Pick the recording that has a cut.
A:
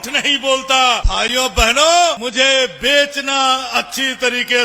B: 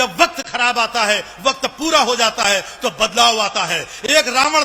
A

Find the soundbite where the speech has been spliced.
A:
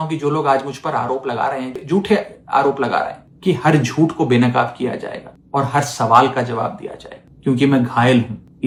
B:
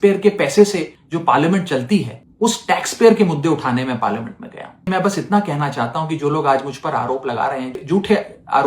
B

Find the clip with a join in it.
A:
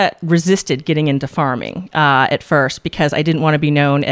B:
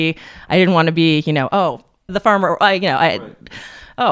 B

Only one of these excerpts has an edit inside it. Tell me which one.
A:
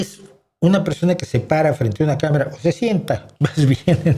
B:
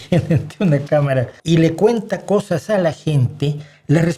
B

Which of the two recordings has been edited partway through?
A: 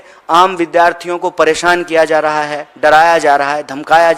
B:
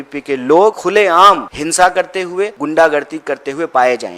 B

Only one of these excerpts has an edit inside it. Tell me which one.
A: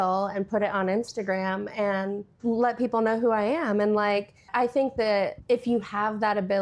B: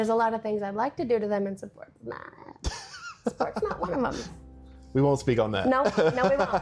A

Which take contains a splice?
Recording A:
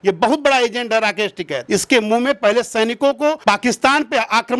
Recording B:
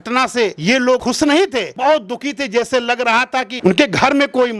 B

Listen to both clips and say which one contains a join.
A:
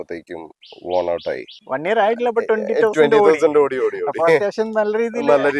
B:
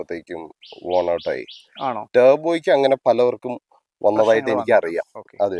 A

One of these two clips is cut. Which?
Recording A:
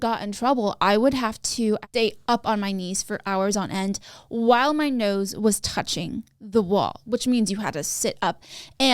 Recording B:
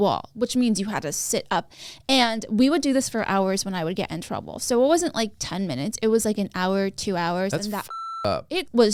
A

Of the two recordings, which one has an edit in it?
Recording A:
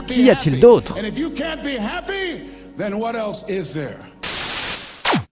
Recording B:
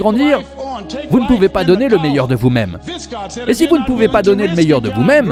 A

